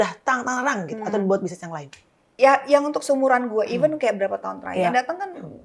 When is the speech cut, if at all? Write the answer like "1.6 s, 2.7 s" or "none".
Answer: 2.3 s